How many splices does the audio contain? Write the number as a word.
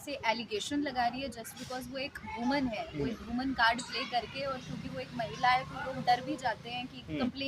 zero